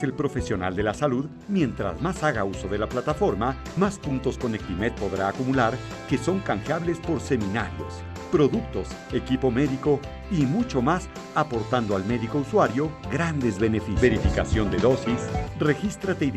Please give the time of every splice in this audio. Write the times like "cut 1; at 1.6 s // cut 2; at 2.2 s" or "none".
cut 1; at 13.9 s // cut 2; at 15.4 s